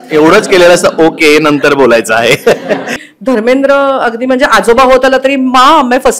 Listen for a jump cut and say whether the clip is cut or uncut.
cut